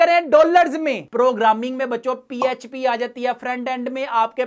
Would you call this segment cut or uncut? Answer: cut